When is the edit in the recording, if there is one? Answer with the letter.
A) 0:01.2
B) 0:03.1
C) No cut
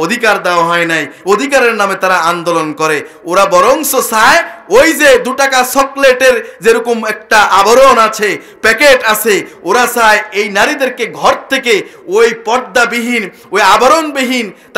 C